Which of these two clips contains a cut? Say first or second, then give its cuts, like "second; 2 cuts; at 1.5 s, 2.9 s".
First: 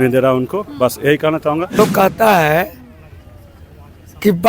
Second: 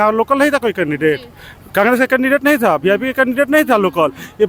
first; 1 cut; at 1.7 s